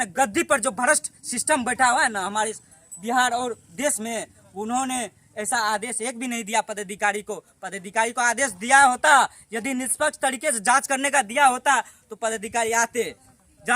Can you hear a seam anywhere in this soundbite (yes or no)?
no